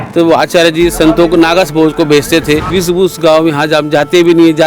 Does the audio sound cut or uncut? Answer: cut